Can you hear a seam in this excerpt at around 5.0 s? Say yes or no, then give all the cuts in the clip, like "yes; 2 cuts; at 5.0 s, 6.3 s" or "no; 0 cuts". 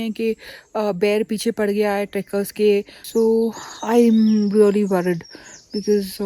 no; 1 cut; at 3.0 s